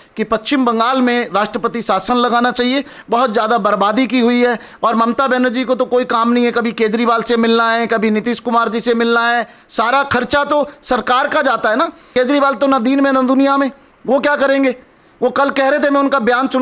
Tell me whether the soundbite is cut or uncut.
cut